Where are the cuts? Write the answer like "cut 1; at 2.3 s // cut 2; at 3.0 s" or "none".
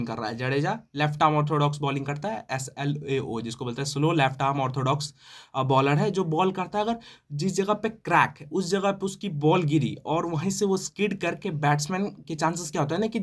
none